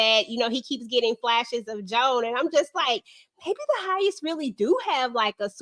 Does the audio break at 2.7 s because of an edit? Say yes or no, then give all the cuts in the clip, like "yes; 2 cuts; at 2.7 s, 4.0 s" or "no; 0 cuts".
no; 0 cuts